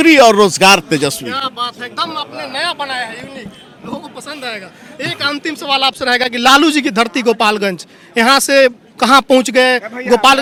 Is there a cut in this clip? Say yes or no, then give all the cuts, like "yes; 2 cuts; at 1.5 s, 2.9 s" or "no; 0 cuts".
no; 0 cuts